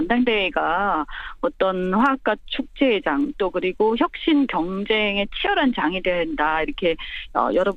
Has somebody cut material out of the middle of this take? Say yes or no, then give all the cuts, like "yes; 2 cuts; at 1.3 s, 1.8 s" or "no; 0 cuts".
no; 0 cuts